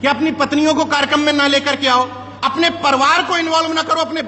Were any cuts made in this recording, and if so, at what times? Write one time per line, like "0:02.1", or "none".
none